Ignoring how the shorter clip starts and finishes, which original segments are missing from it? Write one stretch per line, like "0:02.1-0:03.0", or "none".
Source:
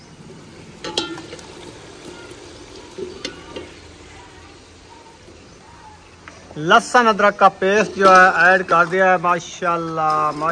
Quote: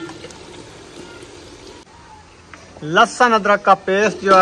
0:02.9-0:05.6